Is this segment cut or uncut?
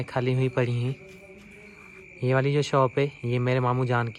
uncut